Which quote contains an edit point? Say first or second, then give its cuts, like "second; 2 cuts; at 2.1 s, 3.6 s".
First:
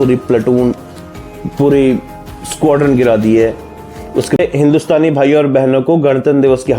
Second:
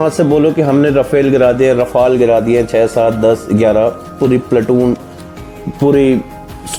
first; 1 cut; at 4.4 s